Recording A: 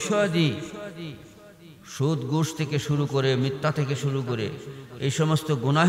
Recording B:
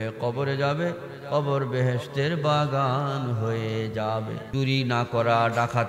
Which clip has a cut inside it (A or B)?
B